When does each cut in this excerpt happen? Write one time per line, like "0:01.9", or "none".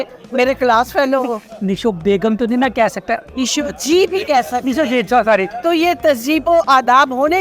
0:01.5
0:03.2
0:05.6